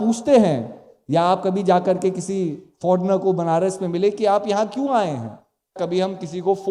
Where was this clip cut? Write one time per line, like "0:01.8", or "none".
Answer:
0:05.8